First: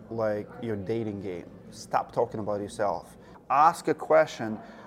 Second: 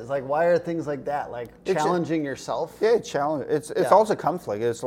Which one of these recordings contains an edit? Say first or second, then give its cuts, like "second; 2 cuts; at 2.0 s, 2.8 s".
first; 1 cut; at 3.3 s